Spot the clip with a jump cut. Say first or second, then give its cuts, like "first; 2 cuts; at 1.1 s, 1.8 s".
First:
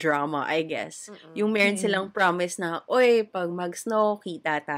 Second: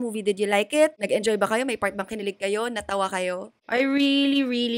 second; 2 cuts; at 1.0 s, 3.5 s